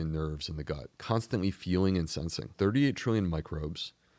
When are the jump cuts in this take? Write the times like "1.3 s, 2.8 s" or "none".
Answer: 0.9 s, 2.5 s